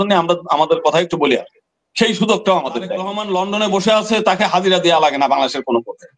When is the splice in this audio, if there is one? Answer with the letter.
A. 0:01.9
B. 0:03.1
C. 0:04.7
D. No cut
B